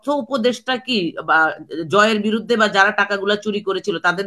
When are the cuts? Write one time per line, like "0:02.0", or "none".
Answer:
none